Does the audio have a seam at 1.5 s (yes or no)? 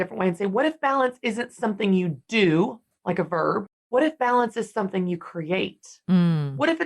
no